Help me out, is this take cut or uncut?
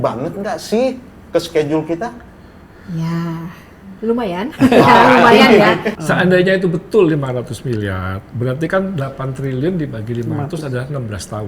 cut